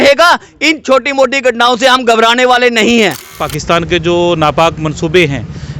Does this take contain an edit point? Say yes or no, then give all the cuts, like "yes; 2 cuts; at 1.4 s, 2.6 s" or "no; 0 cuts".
yes; 1 cut; at 3.5 s